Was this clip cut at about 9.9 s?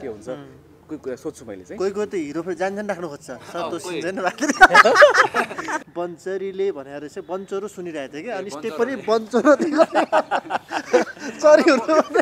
no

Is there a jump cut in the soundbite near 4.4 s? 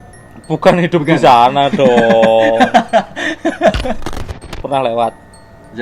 yes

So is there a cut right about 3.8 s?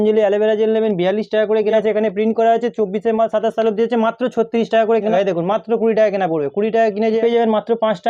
no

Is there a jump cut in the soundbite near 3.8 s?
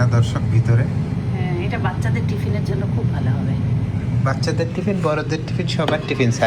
no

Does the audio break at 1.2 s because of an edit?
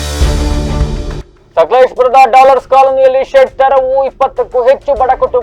no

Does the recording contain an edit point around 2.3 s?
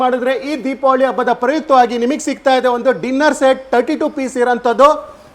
no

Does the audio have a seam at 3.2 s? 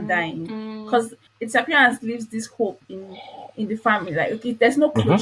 no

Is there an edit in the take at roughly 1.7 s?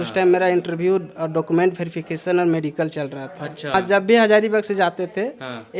no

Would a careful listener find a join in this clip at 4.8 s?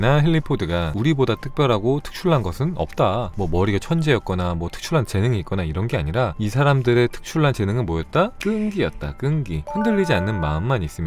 no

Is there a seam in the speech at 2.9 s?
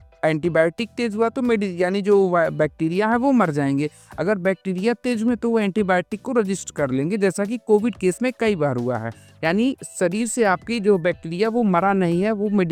no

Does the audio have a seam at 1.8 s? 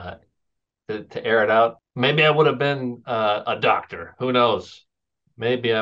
yes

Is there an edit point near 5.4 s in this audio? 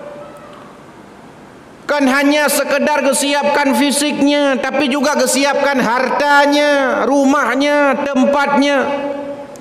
no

